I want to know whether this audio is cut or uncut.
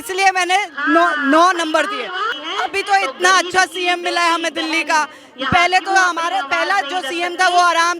cut